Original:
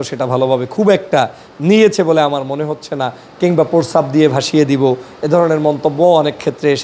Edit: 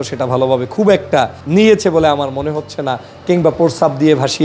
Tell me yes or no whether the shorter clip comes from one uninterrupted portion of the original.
no